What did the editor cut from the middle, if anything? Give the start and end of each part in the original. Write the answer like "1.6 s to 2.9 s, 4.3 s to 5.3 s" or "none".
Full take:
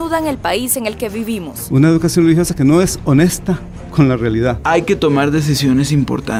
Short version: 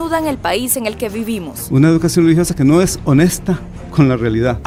none